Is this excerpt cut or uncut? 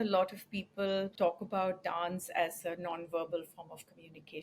cut